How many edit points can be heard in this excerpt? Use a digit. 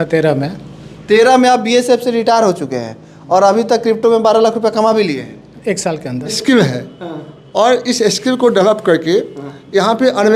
1